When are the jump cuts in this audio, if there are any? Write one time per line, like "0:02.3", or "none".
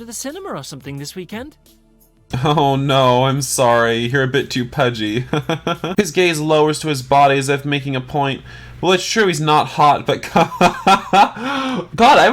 0:05.9